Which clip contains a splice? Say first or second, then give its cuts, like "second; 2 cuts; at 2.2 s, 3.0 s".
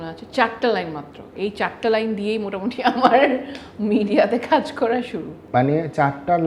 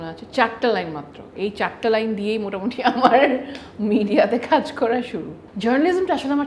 second; 1 cut; at 5.4 s